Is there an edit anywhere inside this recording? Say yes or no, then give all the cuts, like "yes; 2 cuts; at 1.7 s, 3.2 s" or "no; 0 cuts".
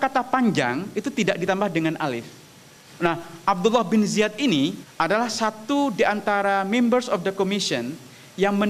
yes; 2 cuts; at 3.1 s, 4.8 s